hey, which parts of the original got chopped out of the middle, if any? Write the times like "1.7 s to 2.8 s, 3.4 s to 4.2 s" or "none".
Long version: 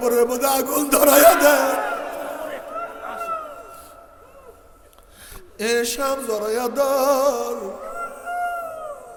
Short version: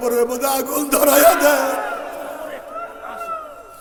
none

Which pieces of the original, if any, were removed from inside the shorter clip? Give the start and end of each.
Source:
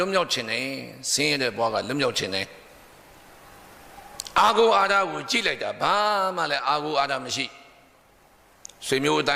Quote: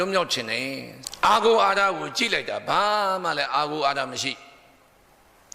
1.0 s to 4.1 s

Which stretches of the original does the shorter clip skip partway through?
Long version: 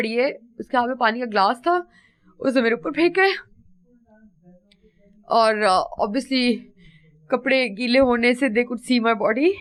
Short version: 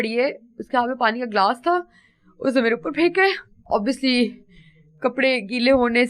3.6 s to 5.9 s

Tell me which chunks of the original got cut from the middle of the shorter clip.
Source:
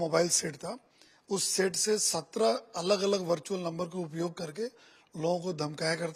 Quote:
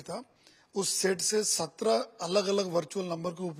none

